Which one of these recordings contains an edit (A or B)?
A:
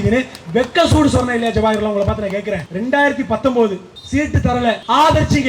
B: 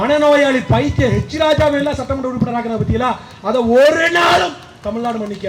A